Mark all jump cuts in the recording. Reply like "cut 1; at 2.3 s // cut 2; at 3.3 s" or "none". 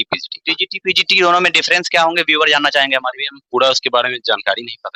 none

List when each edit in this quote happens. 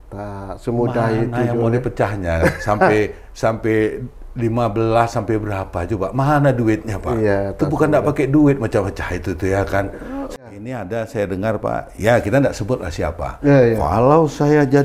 cut 1; at 10.4 s

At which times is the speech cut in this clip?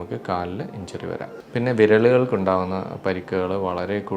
cut 1; at 1.4 s

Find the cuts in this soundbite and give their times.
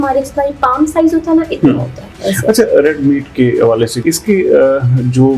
cut 1; at 2.1 s // cut 2; at 4.0 s

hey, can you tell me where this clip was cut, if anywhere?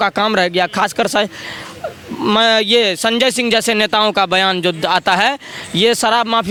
none

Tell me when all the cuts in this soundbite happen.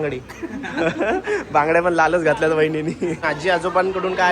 cut 1; at 3.2 s

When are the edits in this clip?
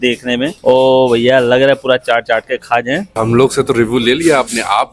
cut 1; at 3.1 s

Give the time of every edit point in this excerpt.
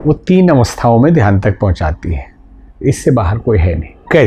none

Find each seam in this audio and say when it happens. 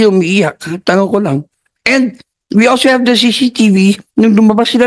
none

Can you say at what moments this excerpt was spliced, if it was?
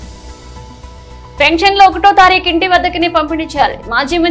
cut 1; at 1.1 s

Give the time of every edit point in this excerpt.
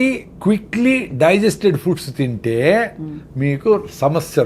none

